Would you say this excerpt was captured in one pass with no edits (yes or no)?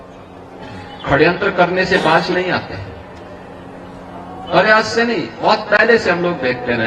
yes